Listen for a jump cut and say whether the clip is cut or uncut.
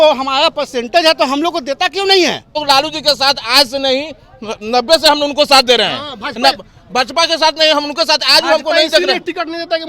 cut